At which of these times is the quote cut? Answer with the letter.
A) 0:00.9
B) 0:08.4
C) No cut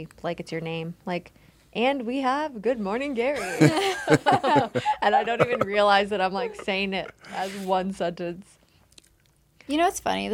C